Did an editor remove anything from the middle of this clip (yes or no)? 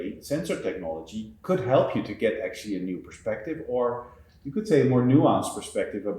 yes